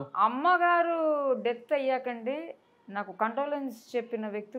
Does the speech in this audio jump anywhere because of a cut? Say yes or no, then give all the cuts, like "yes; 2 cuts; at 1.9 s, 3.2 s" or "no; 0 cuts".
no; 0 cuts